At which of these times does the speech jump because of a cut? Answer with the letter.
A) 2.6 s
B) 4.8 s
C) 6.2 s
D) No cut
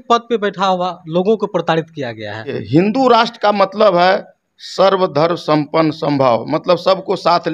A